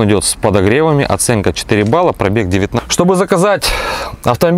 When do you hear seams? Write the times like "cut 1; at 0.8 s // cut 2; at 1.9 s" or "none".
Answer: cut 1; at 2.7 s